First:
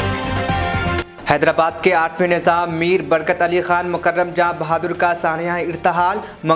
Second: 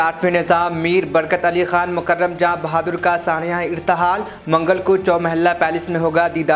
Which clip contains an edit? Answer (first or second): first